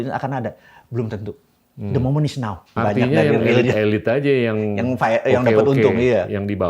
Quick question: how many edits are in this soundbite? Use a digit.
1